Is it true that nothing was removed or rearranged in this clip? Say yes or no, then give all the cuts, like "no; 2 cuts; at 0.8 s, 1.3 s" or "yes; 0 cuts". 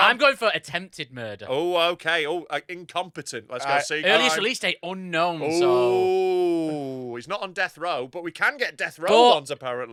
yes; 0 cuts